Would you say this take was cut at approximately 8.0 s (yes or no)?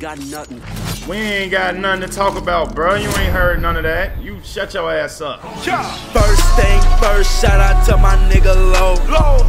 no